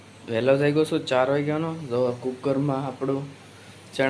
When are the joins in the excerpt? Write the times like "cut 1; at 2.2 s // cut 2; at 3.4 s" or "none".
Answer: none